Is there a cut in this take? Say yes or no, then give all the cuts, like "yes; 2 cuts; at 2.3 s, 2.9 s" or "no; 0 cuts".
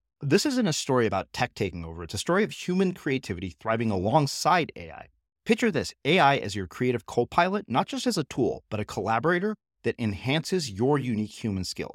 no; 0 cuts